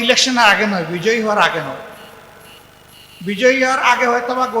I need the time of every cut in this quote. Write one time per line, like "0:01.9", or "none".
none